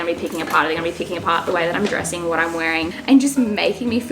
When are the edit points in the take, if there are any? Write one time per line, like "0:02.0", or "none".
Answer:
0:02.9